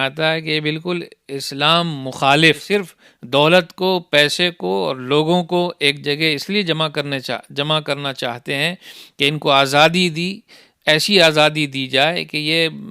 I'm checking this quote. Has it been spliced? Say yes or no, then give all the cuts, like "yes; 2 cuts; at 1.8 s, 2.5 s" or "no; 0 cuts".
yes; 1 cut; at 2.6 s